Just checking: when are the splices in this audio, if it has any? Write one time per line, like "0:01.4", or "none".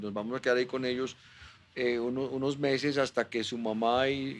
none